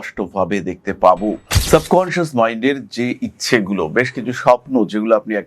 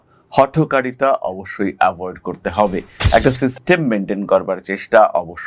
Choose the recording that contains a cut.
first; 1 cut; at 1.5 s

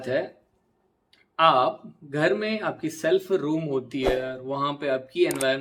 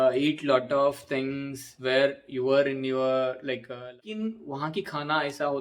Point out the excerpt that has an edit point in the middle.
second; 1 cut; at 4.1 s

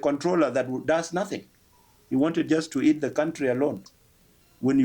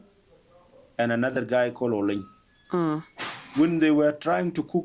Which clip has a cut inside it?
first; 1 cut; at 3.9 s

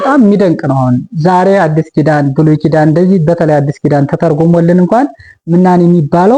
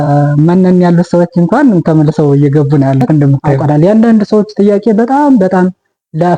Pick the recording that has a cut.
second; 1 cut; at 3.8 s

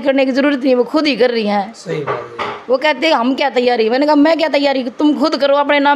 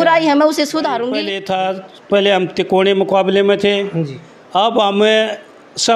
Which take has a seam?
second; 1 cut; at 1.3 s

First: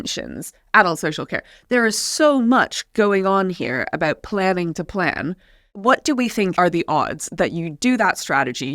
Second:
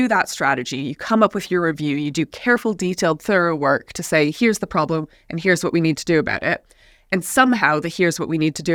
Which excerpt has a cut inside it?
first; 2 cuts; at 5.8 s, 6.5 s

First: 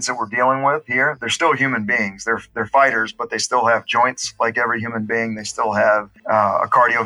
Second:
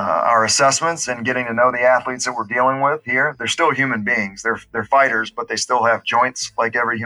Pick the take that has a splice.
first; 1 cut; at 6.1 s

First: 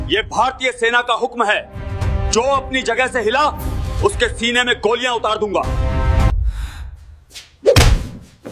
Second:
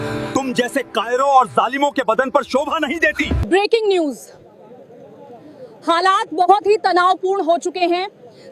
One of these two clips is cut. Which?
second; 1 cut; at 3.4 s

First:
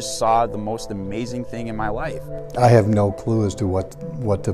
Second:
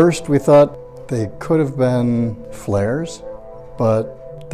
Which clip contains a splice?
first; 1 cut; at 2.5 s

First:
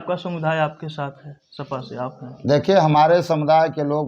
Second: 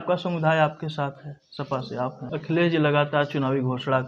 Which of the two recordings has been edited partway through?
second; 1 cut; at 2.2 s

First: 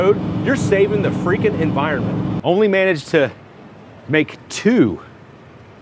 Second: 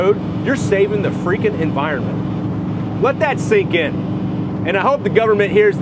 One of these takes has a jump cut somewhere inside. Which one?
first; 1 cut; at 2.4 s

